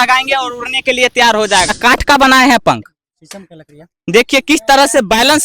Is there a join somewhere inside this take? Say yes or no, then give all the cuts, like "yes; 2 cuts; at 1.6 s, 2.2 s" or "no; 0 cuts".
yes; 1 cut; at 1.7 s